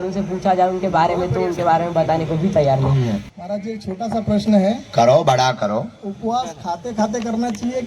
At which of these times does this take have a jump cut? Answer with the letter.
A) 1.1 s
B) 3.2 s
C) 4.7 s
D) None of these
B